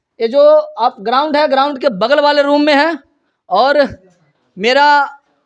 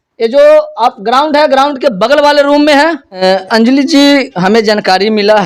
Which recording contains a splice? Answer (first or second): second